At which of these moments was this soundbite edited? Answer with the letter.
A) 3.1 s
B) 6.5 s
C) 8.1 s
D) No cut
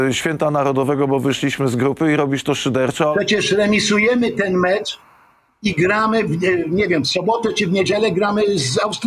A